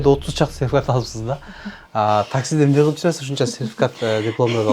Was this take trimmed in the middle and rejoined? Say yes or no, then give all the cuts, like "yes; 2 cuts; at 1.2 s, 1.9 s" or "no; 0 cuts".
no; 0 cuts